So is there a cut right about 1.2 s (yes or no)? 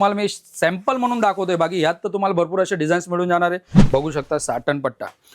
no